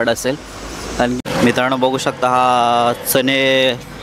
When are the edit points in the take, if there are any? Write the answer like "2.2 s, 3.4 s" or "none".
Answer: 1.2 s